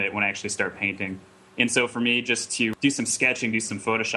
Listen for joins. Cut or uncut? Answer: cut